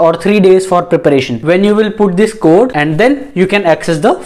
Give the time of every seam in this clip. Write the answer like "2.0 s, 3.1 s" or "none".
1.3 s, 2.7 s